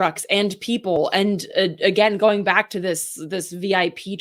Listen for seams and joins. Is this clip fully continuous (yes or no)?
yes